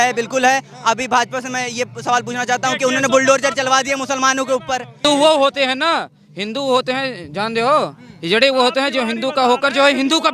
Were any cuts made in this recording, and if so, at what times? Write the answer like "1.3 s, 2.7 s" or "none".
5.0 s